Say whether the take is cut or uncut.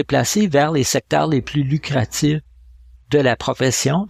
uncut